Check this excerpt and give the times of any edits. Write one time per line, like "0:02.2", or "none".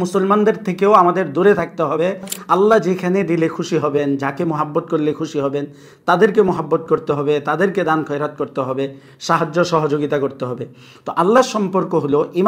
0:02.3